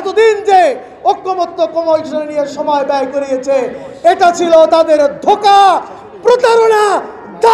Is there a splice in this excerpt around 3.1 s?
no; 0 cuts

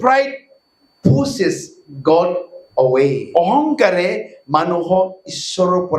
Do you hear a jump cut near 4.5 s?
no; 1 cut; at 3.2 s

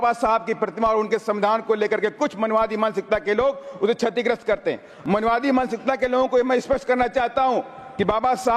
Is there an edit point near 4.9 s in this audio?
yes; 1 cut; at 4.9 s

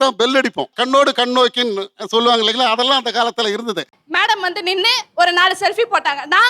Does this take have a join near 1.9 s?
no; 1 cut; at 3.9 s

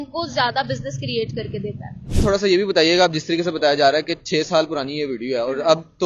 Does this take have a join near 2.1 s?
yes; 1 cut; at 2.1 s

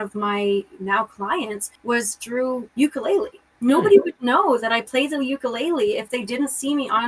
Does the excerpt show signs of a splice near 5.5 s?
no; 3 cuts; at 1.7 s, 2.7 s, 3.4 s

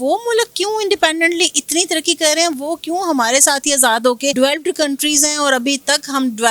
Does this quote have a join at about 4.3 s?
yes; 1 cut; at 4.3 s

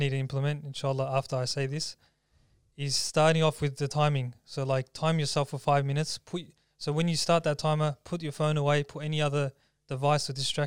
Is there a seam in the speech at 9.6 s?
no; 0 cuts

